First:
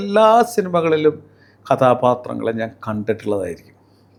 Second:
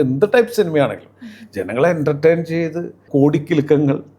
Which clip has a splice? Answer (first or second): second